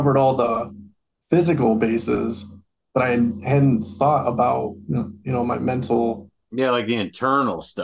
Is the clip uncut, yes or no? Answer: yes